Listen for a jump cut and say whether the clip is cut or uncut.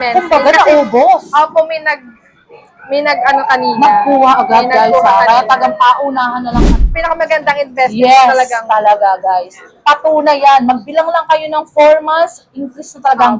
cut